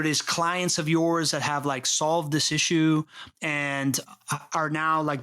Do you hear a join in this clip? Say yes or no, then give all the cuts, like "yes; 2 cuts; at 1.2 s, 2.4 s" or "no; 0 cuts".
no; 0 cuts